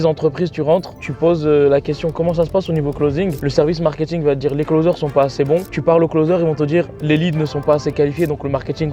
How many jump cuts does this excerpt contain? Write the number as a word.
one